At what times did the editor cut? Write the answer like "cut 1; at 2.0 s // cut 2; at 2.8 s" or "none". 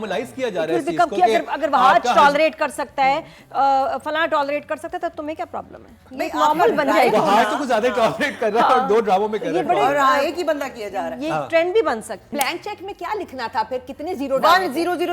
cut 1; at 12.3 s